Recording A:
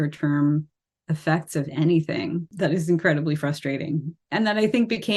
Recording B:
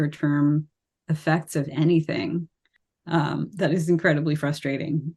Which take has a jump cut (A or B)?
A